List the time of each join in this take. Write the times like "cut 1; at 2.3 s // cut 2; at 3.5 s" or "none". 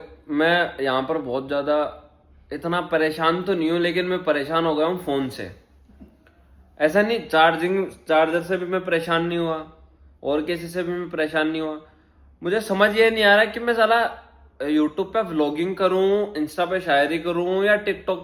none